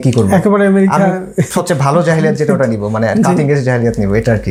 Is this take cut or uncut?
uncut